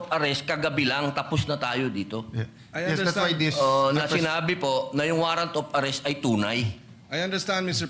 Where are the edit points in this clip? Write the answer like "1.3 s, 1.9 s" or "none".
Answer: none